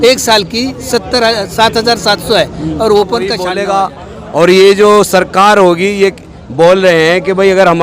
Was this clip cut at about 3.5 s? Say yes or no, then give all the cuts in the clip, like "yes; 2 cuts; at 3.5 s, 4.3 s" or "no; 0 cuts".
yes; 1 cut; at 3.5 s